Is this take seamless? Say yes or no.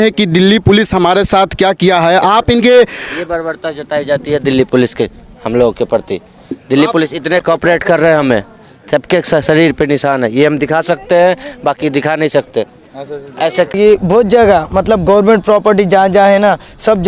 no